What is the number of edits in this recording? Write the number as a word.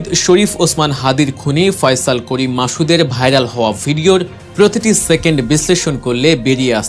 one